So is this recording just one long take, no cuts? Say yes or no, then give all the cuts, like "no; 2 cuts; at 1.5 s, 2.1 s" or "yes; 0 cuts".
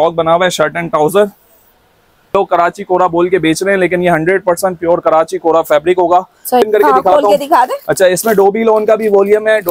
no; 2 cuts; at 2.3 s, 6.6 s